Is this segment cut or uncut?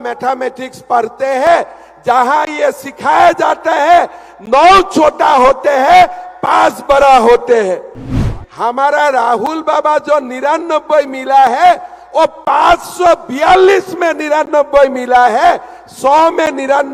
cut